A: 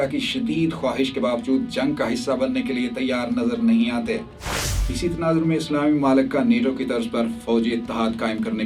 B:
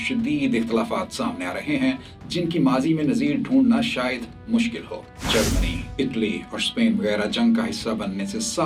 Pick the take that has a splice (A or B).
A